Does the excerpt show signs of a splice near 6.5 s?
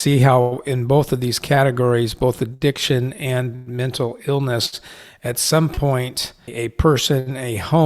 yes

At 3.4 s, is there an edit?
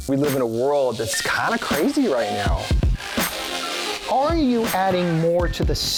no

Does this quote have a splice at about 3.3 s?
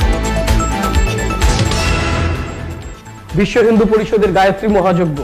no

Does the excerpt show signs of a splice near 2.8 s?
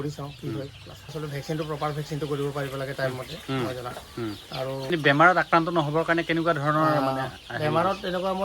no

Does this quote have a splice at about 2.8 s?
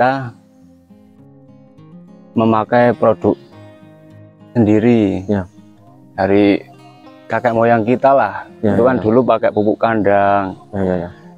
no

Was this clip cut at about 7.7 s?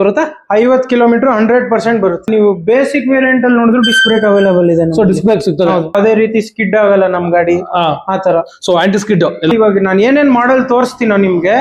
no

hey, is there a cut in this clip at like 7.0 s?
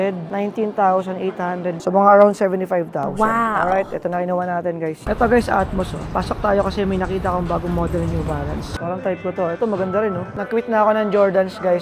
no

